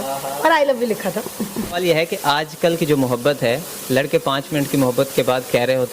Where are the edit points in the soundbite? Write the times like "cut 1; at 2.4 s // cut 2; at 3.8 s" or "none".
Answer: cut 1; at 1.7 s